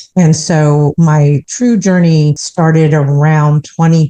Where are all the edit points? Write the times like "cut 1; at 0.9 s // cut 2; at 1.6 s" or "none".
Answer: cut 1; at 1.1 s // cut 2; at 2.4 s